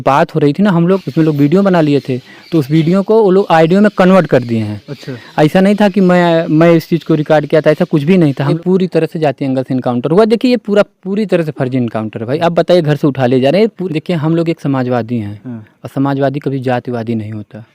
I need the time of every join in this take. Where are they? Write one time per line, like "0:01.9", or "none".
0:01.0
0:08.5
0:13.8